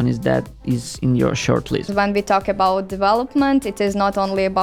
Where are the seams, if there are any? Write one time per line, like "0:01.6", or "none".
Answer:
0:01.9